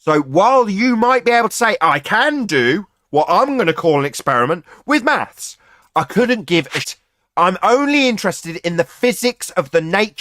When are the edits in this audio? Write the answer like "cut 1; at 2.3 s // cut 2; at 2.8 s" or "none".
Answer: cut 1; at 6.8 s